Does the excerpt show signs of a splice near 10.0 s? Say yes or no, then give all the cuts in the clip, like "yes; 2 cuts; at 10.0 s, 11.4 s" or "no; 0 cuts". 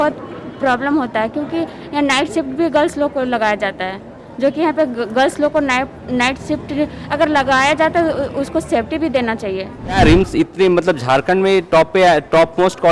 yes; 1 cut; at 10.0 s